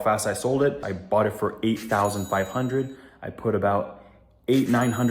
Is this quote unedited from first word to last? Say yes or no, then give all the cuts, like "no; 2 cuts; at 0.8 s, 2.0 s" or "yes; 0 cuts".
no; 1 cut; at 0.9 s